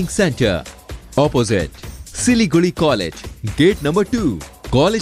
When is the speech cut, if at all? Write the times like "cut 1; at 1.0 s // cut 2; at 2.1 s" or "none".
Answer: none